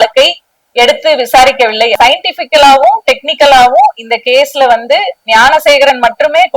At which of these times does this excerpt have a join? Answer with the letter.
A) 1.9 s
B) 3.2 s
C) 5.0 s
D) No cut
A